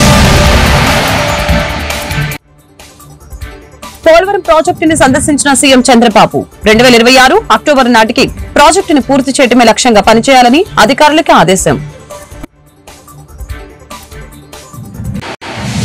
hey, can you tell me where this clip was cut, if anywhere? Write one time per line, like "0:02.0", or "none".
0:04.0
0:11.8
0:13.6